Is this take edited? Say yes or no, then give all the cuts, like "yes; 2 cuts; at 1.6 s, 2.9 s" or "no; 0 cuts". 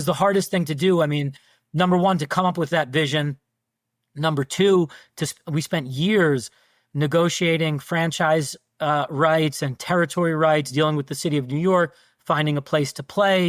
no; 0 cuts